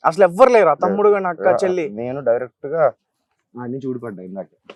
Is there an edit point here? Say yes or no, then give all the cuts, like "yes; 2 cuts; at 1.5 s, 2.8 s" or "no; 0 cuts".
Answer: no; 0 cuts